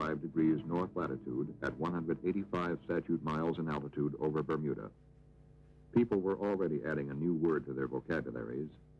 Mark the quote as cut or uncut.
cut